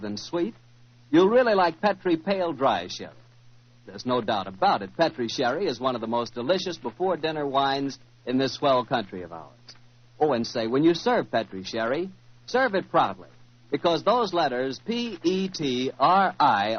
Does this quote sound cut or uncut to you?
cut